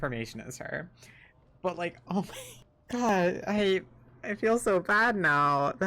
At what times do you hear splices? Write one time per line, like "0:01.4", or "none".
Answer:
0:03.1